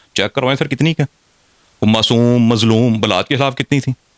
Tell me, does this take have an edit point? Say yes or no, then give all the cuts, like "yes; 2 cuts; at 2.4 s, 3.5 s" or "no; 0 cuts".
no; 0 cuts